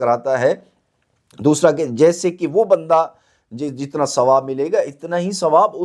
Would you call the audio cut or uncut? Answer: uncut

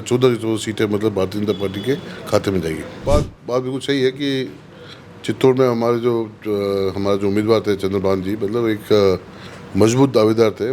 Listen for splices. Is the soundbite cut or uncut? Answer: cut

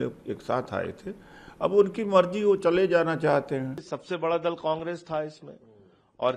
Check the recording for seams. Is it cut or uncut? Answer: cut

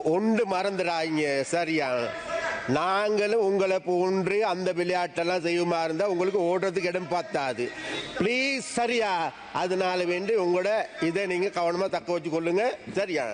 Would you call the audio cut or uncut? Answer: uncut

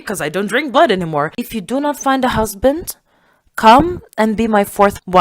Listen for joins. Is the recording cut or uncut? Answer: cut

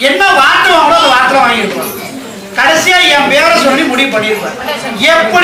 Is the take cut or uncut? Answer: uncut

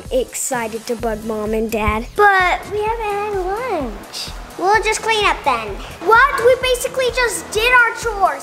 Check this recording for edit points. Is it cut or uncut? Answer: cut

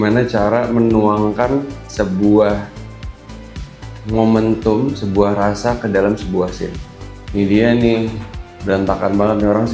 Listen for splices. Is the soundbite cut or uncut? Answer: cut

